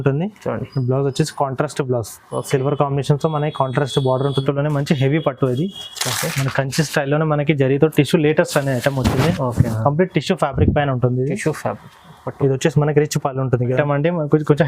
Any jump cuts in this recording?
yes; 2 cuts; at 4.4 s, 13.8 s

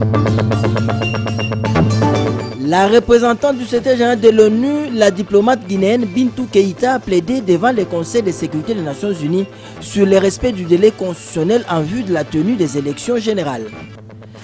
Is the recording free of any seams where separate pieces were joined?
no; 1 cut; at 2.5 s

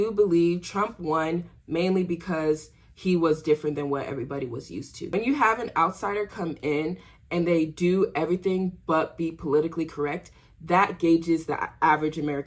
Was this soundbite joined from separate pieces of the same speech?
yes; 1 cut; at 5.1 s

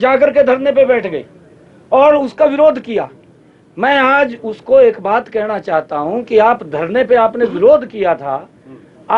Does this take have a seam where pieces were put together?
no; 0 cuts

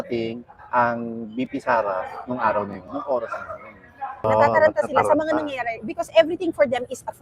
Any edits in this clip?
yes; 1 cut; at 4.3 s

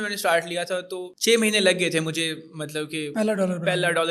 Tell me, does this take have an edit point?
no; 0 cuts

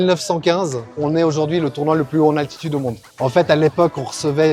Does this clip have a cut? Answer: yes; 2 cuts; at 1.0 s, 3.1 s

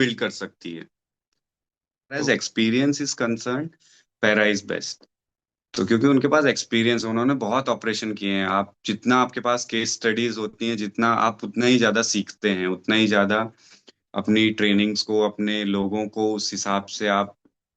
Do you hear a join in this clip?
yes; 1 cut; at 2.2 s

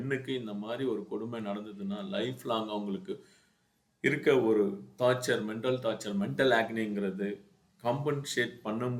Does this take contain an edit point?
no; 0 cuts

